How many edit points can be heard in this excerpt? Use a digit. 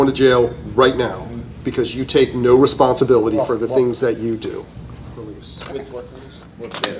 1